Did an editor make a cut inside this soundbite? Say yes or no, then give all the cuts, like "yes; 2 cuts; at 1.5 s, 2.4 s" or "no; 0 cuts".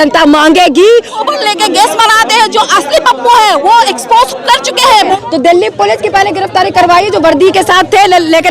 yes; 2 cuts; at 1.1 s, 5.2 s